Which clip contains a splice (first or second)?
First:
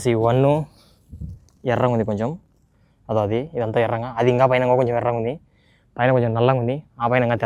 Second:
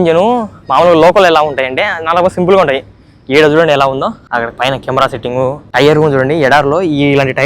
second